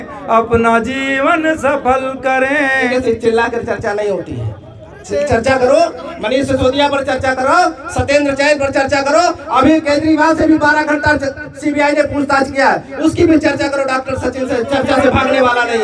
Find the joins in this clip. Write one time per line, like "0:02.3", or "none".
0:02.9